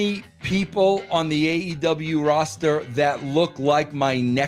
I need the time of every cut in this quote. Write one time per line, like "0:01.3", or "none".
none